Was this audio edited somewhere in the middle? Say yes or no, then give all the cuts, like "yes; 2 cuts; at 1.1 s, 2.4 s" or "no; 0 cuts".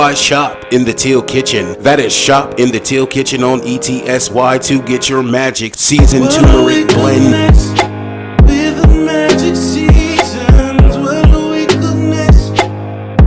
no; 0 cuts